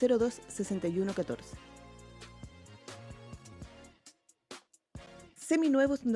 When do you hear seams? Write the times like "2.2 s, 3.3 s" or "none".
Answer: 3.4 s